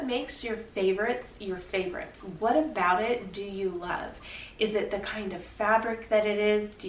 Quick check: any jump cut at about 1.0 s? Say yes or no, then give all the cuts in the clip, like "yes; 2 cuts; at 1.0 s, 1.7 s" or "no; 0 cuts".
no; 1 cut; at 2.3 s